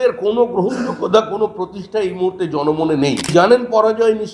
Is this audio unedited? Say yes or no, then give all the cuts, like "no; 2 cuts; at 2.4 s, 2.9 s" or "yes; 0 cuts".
no; 1 cut; at 3.3 s